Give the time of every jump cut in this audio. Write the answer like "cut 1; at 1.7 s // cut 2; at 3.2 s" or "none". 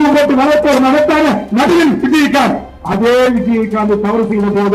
none